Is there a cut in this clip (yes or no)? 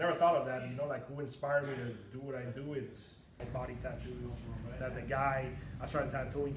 yes